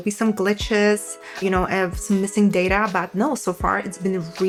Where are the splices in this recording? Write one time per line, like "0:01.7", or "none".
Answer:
none